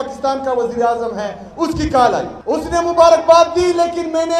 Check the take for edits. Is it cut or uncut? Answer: cut